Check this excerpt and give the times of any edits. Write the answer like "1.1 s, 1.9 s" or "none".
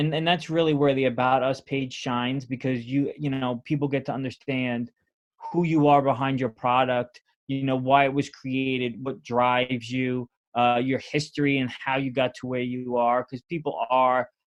none